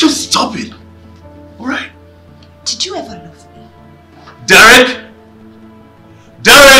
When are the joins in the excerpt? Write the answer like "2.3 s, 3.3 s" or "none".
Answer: none